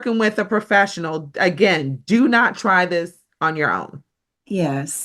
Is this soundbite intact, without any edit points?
yes; 0 cuts

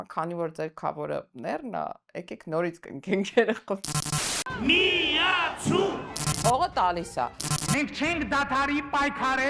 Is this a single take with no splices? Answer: no; 1 cut; at 3.9 s

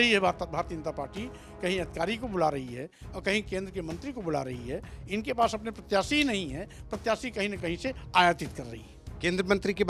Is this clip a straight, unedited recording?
yes; 0 cuts

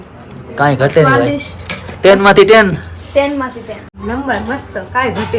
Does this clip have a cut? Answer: yes; 1 cut; at 3.9 s

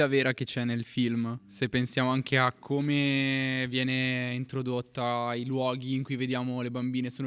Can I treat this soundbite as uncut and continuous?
yes; 0 cuts

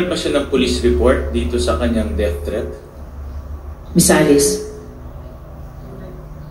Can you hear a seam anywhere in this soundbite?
no; 0 cuts

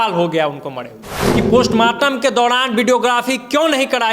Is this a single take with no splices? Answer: no; 1 cut; at 1.2 s

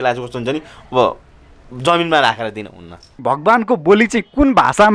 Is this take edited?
yes; 1 cut; at 3.2 s

